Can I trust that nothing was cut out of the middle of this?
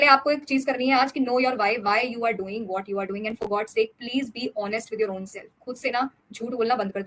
yes; 0 cuts

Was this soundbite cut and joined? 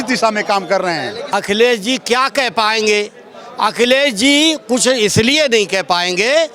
yes; 1 cut; at 1.3 s

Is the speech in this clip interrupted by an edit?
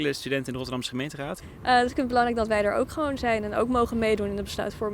yes; 1 cut; at 1.4 s

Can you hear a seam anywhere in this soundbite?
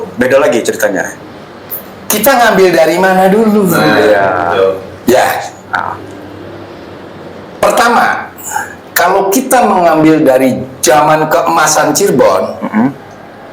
no; 0 cuts

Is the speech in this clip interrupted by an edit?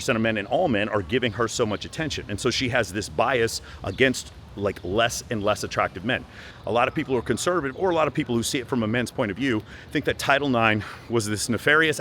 yes; 1 cut; at 6.4 s

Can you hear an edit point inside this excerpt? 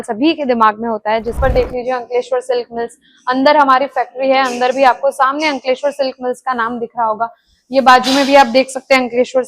yes; 1 cut; at 1.4 s

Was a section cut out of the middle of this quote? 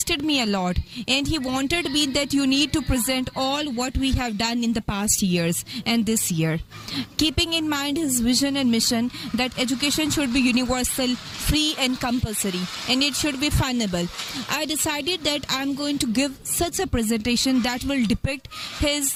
no; 0 cuts

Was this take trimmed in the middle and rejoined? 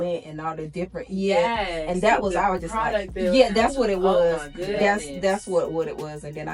no; 0 cuts

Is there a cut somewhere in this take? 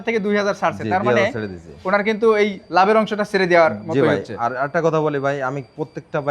no; 0 cuts

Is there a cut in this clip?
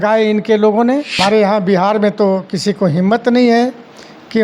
yes; 1 cut; at 1.2 s

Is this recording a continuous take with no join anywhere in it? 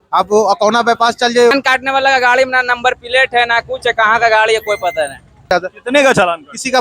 no; 2 cuts; at 1.5 s, 5.5 s

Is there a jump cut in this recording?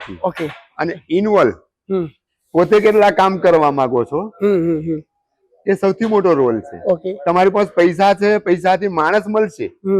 no; 0 cuts

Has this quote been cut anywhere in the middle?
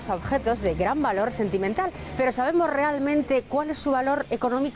no; 0 cuts

